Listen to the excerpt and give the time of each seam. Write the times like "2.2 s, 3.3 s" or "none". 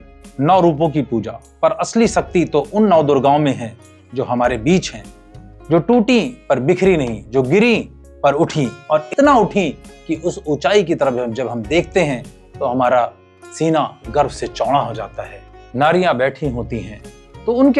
15.5 s